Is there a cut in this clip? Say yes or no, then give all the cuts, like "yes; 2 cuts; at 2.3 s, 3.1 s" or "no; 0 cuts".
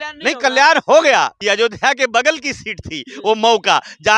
yes; 1 cut; at 1.4 s